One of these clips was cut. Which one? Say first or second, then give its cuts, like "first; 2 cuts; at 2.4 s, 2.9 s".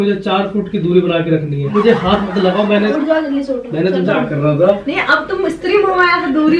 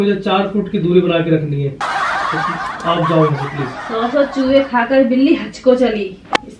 first; 2 cuts; at 1.7 s, 4.1 s